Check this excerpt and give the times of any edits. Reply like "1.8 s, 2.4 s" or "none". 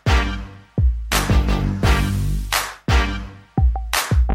none